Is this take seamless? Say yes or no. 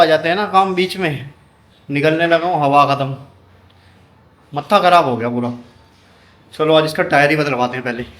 yes